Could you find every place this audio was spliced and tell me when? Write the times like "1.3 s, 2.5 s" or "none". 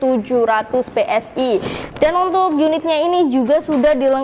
1.8 s